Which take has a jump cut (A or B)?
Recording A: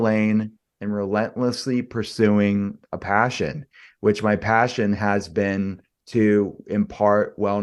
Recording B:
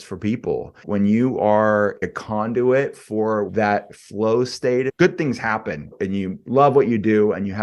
B